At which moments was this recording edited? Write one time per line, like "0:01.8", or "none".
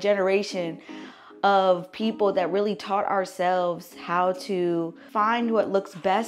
0:05.0